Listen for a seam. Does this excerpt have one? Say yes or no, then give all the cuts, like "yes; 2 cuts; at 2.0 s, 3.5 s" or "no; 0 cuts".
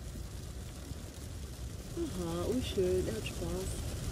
no; 0 cuts